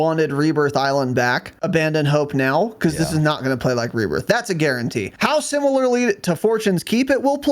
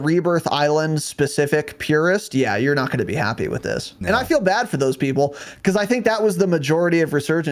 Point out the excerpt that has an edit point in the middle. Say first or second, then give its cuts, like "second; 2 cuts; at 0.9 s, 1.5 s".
first; 2 cuts; at 1.5 s, 5.1 s